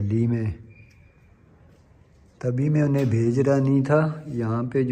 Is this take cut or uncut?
uncut